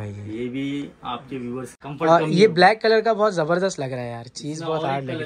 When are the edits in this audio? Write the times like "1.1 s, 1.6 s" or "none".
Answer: 1.7 s